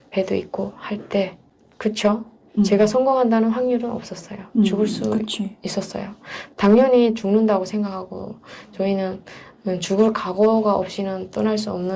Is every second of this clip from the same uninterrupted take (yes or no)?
yes